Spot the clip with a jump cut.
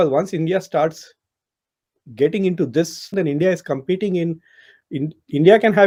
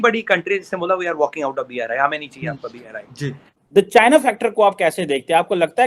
second; 1 cut; at 3.6 s

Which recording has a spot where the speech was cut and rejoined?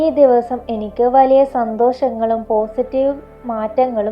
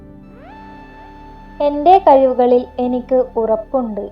second; 1 cut; at 1.6 s

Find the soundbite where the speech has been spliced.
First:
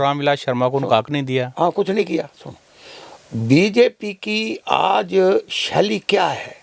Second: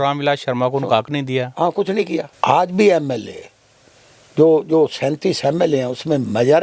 second; 1 cut; at 2.3 s

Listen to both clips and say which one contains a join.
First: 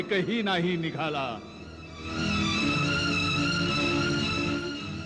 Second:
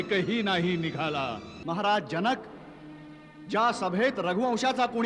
second; 1 cut; at 1.5 s

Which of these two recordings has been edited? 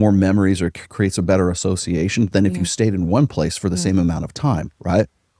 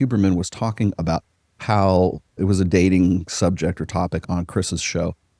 second; 2 cuts; at 2.4 s, 4.2 s

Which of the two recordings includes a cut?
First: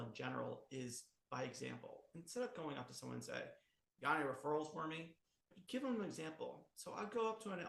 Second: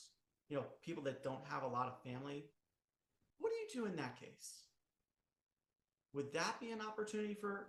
first; 1 cut; at 5.5 s

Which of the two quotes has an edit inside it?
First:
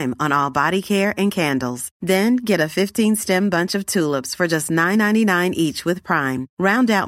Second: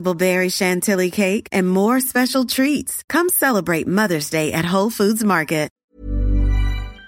second; 1 cut; at 5.7 s

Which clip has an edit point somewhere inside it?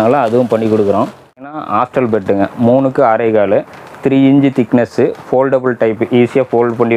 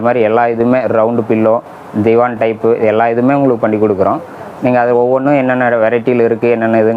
first; 1 cut; at 1.6 s

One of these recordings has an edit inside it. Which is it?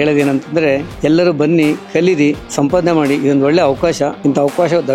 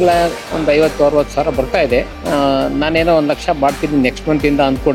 first; 3 cuts; at 0.9 s, 2.5 s, 4.2 s

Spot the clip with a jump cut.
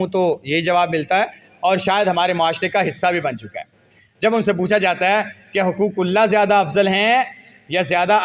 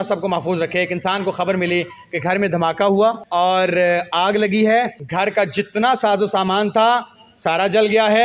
second; 2 cuts; at 3.2 s, 5.0 s

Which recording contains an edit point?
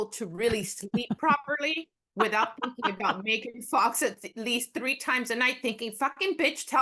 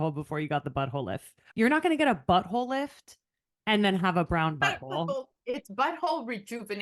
second; 2 cuts; at 1.4 s, 5.3 s

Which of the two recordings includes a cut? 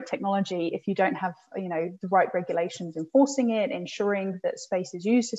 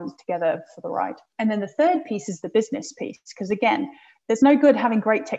second; 1 cut; at 1.3 s

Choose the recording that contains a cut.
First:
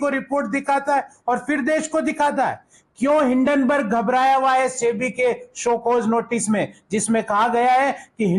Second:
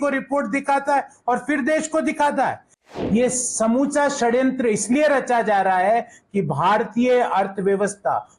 second; 1 cut; at 2.9 s

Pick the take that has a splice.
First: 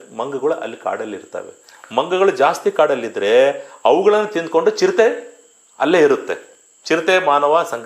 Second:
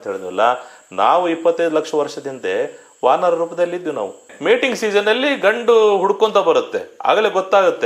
second; 1 cut; at 4.3 s

